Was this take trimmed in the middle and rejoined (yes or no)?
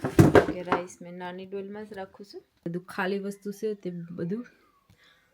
yes